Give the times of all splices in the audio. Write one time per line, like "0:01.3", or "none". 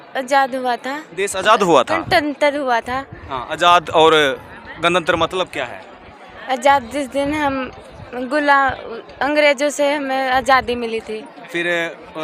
none